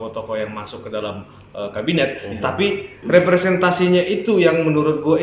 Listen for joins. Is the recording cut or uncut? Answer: uncut